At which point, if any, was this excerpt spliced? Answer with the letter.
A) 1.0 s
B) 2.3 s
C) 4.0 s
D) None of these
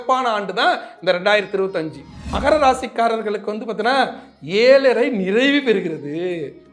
B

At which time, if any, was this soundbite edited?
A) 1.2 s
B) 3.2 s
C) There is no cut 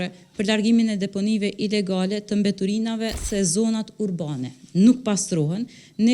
B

